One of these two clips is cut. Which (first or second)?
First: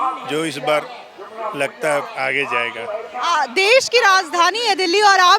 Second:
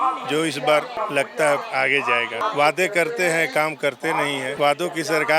second